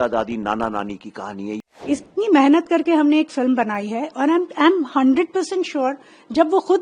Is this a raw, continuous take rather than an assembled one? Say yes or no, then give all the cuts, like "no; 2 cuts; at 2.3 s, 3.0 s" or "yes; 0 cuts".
no; 1 cut; at 1.6 s